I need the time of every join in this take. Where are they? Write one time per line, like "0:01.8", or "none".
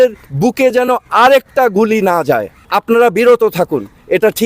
0:02.6